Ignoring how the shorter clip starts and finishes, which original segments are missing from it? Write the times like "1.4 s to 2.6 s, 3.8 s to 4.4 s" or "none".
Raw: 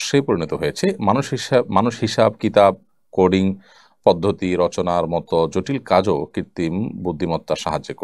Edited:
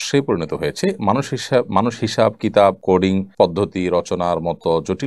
3.0 s to 3.7 s